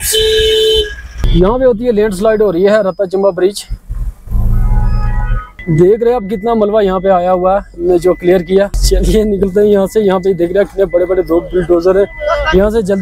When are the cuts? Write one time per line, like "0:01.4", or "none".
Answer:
0:05.6